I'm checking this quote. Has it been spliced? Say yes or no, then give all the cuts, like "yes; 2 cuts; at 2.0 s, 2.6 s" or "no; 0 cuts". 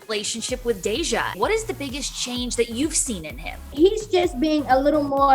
yes; 2 cuts; at 1.3 s, 3.6 s